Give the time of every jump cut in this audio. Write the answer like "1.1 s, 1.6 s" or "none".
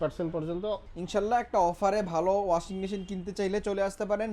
0.9 s